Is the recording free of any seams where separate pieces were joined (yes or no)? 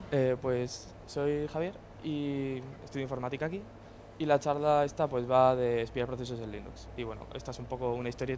yes